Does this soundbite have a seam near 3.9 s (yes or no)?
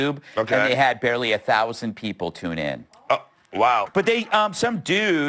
yes